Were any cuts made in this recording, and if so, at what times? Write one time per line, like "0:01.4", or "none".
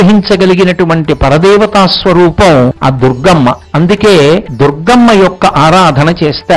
0:02.8
0:03.6
0:04.5